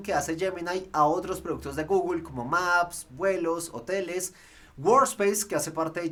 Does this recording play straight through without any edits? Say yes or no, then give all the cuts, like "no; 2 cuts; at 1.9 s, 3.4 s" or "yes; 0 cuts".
yes; 0 cuts